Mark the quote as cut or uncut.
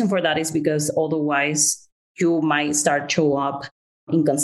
uncut